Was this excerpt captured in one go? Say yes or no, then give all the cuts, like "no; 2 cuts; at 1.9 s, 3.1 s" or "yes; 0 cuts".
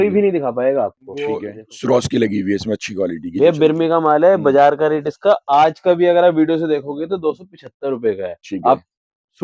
no; 1 cut; at 1.4 s